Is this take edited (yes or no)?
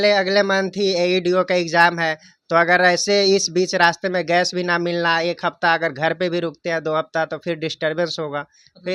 no